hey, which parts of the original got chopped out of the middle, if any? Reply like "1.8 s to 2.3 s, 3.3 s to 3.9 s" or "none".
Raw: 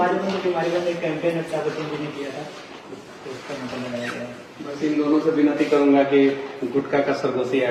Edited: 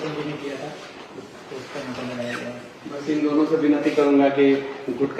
none